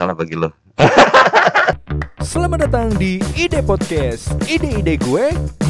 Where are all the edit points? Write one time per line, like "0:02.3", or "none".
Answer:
0:01.7